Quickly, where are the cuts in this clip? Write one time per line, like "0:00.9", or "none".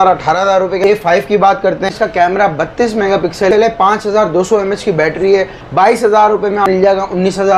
0:00.8
0:01.9
0:03.5
0:05.6
0:06.7